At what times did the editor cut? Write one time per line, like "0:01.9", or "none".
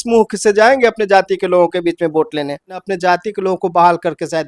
0:02.9

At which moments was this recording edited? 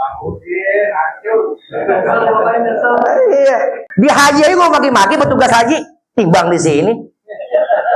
0:03.8

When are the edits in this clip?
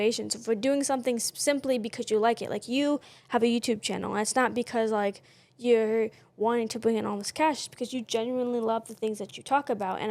none

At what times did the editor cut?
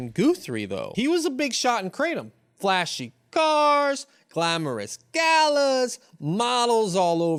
none

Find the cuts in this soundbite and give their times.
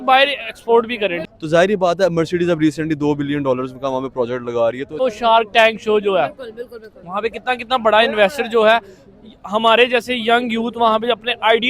0:01.3
0:05.0

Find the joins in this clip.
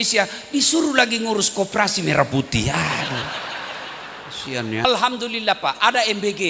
0:04.8

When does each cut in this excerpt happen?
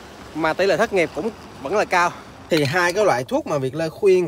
0:02.3

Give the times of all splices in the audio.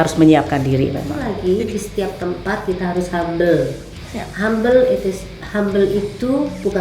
0:01.2

